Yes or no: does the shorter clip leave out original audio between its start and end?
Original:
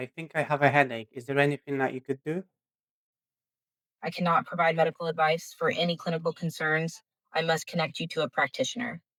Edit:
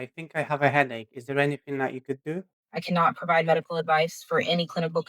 yes